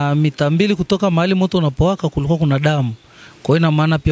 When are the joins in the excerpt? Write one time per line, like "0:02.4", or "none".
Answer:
none